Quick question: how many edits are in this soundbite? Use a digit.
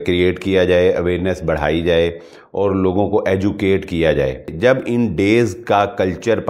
1